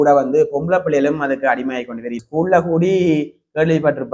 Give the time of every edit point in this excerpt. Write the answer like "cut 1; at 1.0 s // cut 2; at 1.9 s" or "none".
cut 1; at 2.2 s

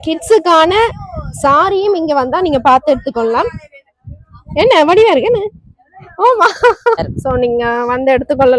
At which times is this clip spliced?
cut 1; at 7.1 s

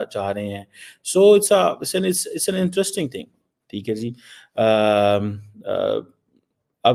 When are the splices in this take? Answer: none

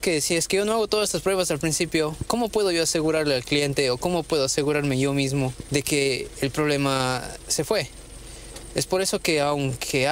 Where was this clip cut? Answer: cut 1; at 2.2 s // cut 2; at 5.6 s

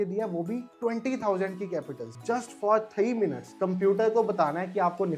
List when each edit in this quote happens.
cut 1; at 2.1 s

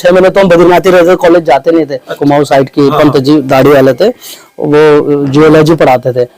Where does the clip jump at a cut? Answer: cut 1; at 2.2 s

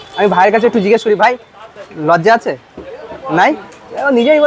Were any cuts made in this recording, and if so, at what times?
none

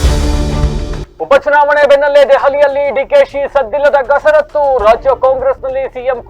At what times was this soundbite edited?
cut 1; at 1.0 s

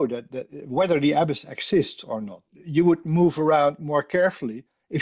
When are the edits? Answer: cut 1; at 2.4 s

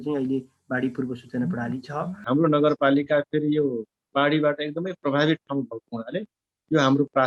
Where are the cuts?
cut 1; at 2.2 s

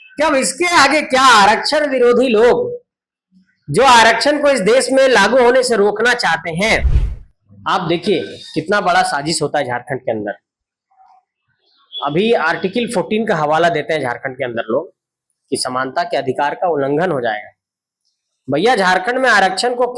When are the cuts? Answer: cut 1; at 7.0 s

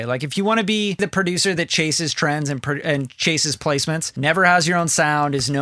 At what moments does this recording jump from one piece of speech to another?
cut 1; at 1.0 s // cut 2; at 4.1 s

